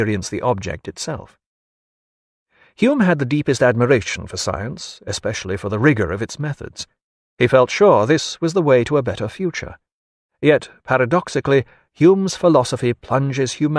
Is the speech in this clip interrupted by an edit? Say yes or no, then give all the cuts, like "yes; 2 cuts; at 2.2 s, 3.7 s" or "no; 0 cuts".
yes; 1 cut; at 9.3 s